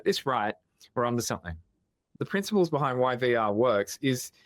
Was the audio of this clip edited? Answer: yes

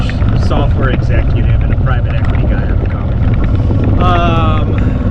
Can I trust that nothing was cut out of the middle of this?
yes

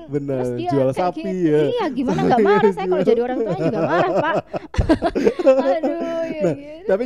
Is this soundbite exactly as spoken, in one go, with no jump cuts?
yes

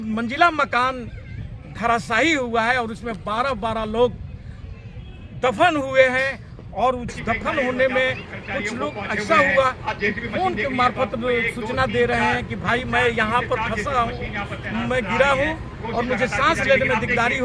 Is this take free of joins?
yes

